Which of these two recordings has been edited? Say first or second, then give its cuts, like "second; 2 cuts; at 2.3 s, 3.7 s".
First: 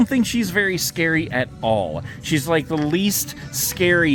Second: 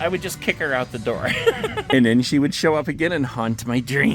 second; 1 cut; at 1.8 s